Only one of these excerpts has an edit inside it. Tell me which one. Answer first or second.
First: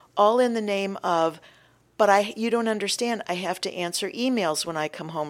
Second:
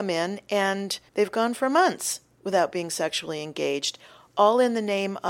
second